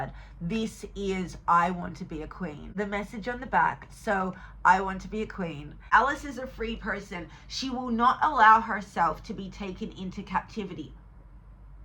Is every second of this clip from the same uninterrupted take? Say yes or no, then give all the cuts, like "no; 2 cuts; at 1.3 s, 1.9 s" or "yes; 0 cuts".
no; 2 cuts; at 2.7 s, 5.9 s